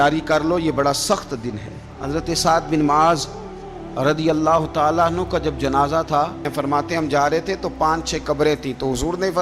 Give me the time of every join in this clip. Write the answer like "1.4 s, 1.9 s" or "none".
1.9 s, 6.5 s